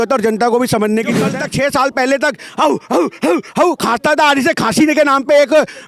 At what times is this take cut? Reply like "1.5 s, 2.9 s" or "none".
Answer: 1.2 s